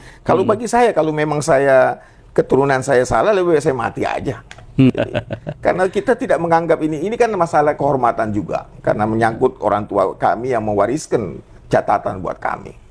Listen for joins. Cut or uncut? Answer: cut